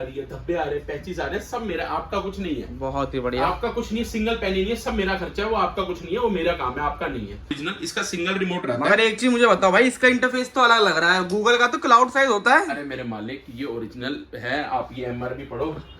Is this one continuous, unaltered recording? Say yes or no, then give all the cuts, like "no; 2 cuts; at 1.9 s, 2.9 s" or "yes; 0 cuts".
no; 1 cut; at 7.6 s